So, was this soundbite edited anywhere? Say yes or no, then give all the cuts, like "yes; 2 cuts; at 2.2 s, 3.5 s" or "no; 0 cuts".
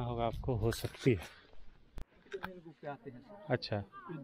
yes; 1 cut; at 2.1 s